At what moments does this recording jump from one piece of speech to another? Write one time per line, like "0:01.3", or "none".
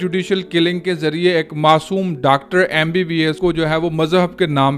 0:03.3